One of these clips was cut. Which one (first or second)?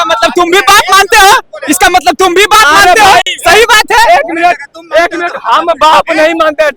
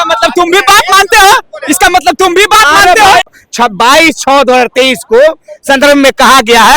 second